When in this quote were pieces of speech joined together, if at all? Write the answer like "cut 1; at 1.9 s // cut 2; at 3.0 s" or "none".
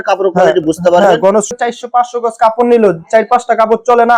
cut 1; at 1.5 s